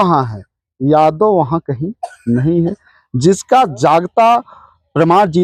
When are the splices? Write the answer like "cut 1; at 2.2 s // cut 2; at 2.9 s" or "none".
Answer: none